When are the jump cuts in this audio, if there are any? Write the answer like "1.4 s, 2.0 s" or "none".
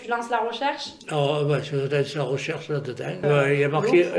none